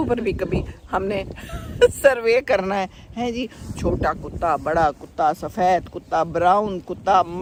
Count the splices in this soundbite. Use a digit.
0